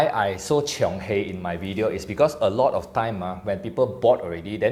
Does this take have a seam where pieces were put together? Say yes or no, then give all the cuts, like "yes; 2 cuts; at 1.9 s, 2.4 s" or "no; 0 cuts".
no; 0 cuts